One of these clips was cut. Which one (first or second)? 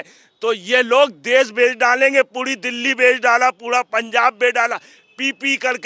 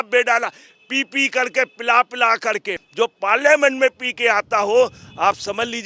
second